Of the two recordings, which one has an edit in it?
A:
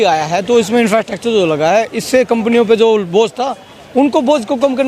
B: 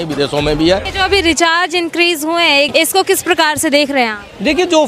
B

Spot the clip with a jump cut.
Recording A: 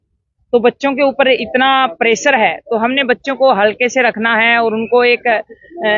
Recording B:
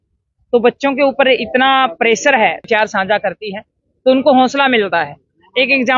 B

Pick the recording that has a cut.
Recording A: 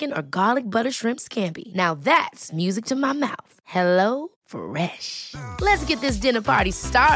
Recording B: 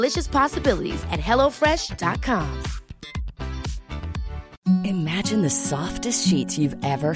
B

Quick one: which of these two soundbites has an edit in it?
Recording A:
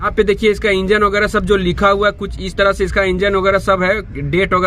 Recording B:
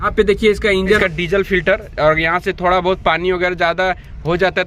B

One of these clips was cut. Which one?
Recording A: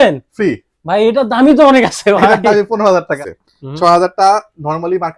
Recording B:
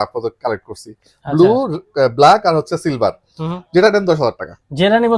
A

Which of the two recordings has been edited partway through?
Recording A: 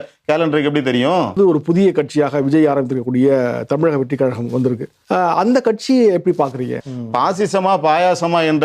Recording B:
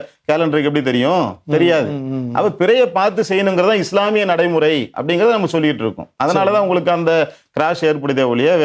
A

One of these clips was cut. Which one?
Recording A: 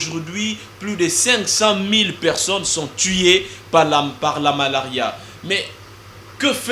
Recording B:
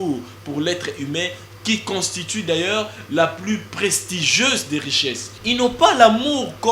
B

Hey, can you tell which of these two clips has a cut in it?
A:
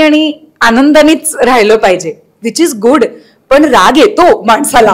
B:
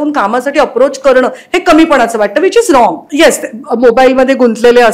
B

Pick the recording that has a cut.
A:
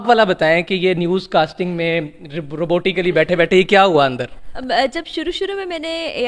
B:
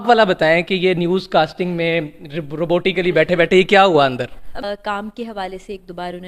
B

